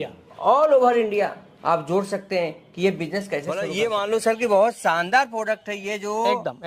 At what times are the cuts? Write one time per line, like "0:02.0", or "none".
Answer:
0:03.6